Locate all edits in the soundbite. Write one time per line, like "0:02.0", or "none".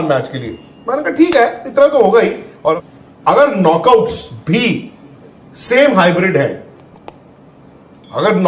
0:02.7